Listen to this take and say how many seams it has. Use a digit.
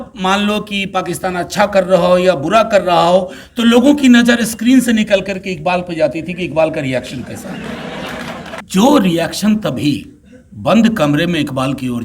1